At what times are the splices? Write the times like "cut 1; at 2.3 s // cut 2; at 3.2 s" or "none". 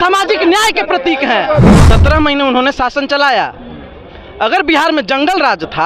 cut 1; at 1.8 s